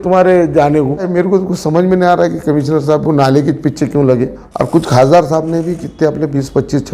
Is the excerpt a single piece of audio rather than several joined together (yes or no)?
no